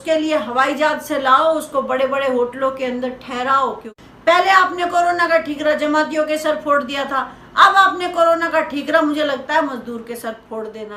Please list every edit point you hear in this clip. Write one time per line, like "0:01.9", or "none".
0:03.9